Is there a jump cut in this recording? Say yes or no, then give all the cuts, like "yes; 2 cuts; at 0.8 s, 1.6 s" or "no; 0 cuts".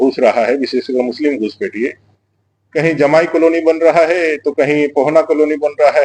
no; 0 cuts